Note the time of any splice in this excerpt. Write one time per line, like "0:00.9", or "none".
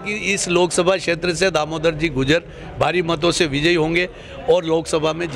none